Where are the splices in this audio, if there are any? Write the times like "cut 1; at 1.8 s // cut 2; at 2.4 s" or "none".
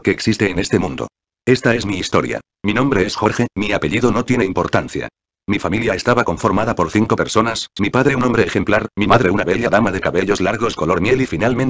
cut 1; at 8.2 s